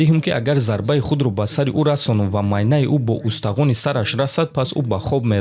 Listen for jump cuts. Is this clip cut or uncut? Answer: uncut